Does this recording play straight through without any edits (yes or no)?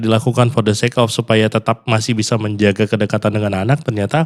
yes